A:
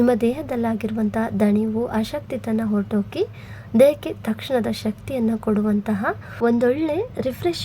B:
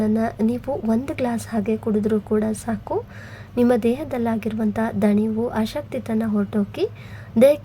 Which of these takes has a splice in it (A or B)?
A